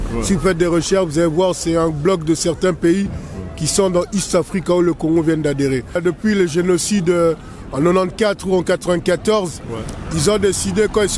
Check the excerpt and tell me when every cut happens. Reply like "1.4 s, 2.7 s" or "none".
6.0 s